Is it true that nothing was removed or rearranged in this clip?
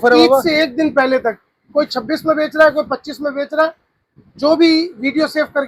yes; 0 cuts

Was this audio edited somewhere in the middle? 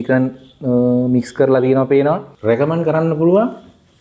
yes; 1 cut; at 2.3 s

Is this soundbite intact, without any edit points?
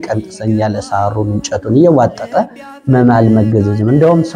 yes; 0 cuts

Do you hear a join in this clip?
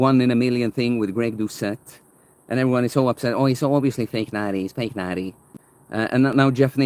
no; 0 cuts

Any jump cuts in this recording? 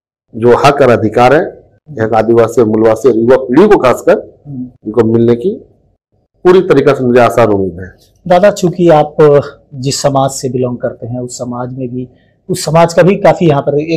no; 0 cuts

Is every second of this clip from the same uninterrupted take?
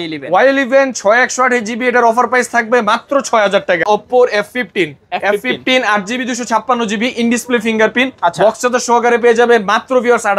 no; 1 cut; at 3.8 s

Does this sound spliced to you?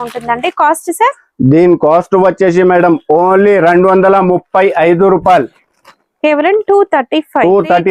no; 0 cuts

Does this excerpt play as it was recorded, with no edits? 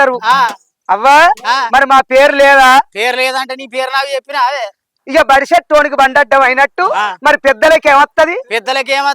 no; 1 cut; at 4.9 s

